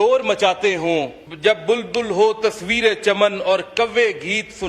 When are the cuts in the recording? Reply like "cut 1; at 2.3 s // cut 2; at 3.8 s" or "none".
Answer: cut 1; at 1.2 s